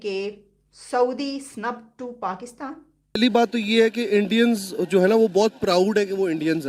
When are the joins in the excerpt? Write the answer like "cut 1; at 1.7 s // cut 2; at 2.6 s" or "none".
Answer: cut 1; at 3.2 s